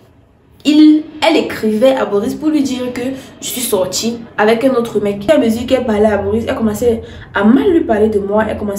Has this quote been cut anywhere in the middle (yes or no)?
yes